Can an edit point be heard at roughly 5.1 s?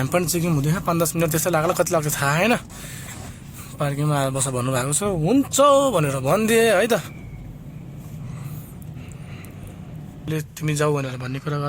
no; 1 cut; at 10.3 s

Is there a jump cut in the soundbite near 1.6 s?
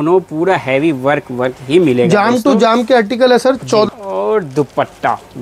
no; 1 cut; at 3.9 s

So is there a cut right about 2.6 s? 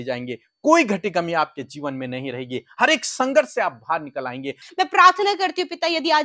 no; 1 cut; at 4.6 s

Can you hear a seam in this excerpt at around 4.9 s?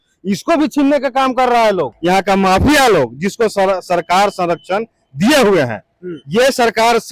no; 1 cut; at 1.9 s

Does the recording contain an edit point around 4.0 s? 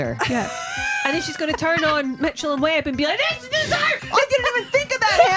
yes; 1 cut; at 4.0 s

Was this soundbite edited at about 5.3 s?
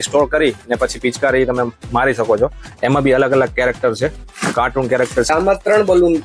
yes; 1 cut; at 5.3 s

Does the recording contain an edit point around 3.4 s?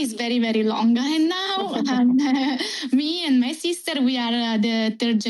no; 0 cuts

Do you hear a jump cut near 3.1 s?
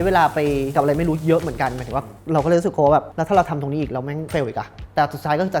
yes; 3 cuts; at 0.7 s, 3.1 s, 4.3 s

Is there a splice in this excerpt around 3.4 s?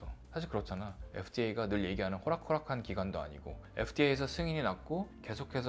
no; 0 cuts

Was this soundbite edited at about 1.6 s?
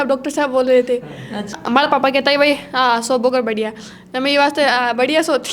yes; 1 cut; at 1.6 s

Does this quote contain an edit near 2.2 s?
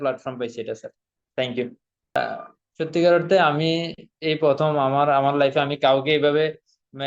yes; 1 cut; at 2.2 s

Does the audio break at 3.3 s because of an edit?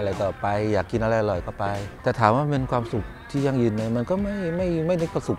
no; 1 cut; at 1.9 s

